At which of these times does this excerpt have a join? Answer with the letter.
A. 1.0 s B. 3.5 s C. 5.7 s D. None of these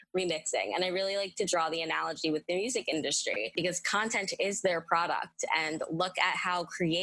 B